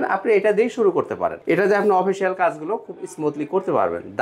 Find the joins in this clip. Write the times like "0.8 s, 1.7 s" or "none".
1.4 s

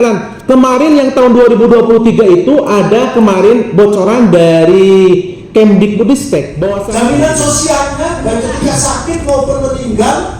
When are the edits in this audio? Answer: 6.7 s

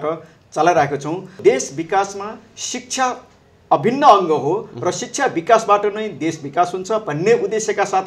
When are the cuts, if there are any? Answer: 1.4 s

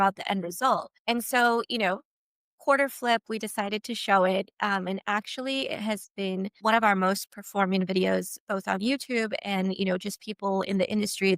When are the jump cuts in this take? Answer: 0.9 s, 6.5 s

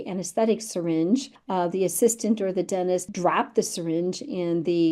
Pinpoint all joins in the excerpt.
1.4 s, 3.1 s

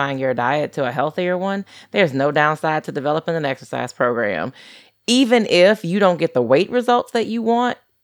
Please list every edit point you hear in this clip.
none

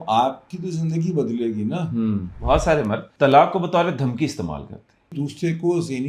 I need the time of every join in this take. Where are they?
2.3 s, 3.1 s, 5.1 s

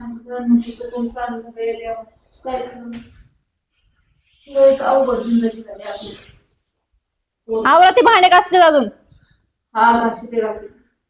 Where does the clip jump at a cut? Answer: none

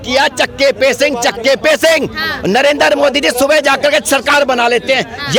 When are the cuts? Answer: none

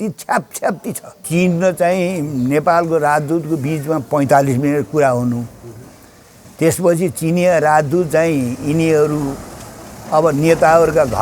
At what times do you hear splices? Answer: 1.2 s

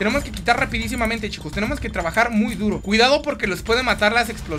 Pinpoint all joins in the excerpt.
2.8 s

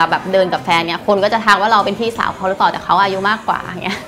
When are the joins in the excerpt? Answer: 1.0 s

